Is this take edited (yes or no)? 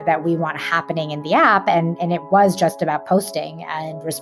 no